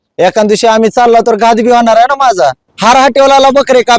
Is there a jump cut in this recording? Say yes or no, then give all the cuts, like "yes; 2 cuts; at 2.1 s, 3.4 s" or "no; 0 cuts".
yes; 1 cut; at 2.7 s